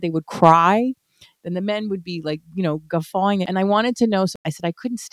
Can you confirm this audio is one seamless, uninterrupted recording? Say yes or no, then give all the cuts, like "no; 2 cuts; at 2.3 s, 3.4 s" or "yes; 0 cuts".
no; 2 cuts; at 3.5 s, 4.3 s